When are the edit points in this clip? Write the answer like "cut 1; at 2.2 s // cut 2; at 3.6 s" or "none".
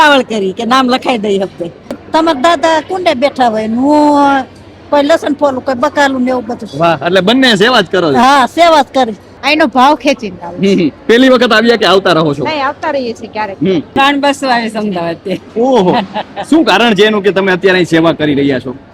cut 1; at 2.0 s // cut 2; at 9.3 s // cut 3; at 14.0 s